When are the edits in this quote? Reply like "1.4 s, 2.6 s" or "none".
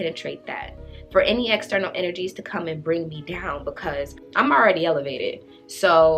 4.2 s